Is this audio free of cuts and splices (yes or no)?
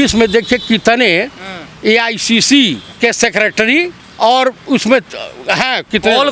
no